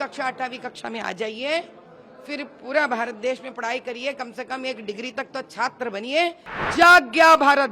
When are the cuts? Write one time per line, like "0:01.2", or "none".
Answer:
0:06.5